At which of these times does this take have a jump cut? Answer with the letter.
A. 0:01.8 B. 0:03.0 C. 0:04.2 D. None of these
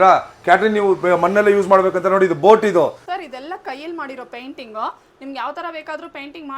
B